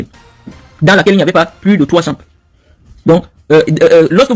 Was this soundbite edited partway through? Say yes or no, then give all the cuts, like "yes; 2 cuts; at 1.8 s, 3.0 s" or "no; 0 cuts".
no; 0 cuts